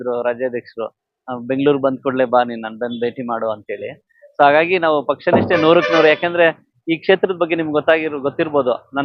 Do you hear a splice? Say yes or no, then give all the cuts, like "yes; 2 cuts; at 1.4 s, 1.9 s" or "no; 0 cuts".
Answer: no; 0 cuts